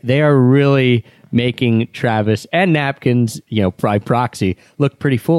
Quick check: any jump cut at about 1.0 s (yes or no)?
no